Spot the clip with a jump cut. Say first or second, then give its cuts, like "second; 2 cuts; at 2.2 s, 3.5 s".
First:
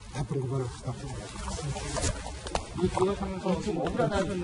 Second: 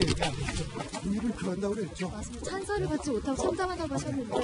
first; 1 cut; at 1.8 s